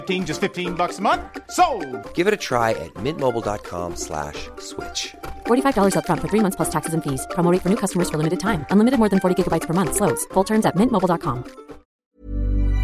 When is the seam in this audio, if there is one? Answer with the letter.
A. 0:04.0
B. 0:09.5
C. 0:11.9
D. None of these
C